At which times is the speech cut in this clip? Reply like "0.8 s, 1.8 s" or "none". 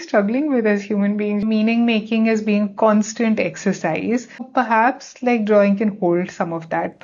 1.4 s, 4.5 s